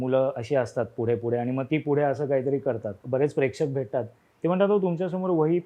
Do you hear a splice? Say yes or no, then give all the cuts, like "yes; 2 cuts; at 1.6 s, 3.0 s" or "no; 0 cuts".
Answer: yes; 1 cut; at 2.9 s